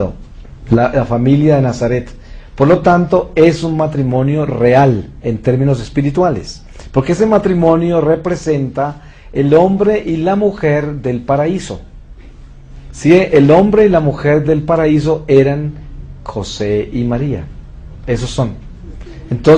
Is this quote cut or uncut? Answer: uncut